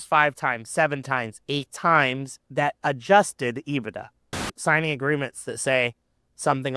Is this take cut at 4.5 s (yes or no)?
yes